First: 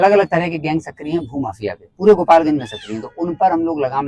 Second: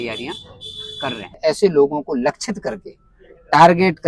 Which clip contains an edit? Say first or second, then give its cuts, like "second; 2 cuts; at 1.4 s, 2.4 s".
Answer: second; 1 cut; at 1.3 s